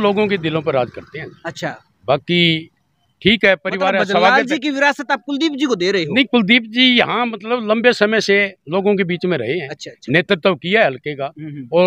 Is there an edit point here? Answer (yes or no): no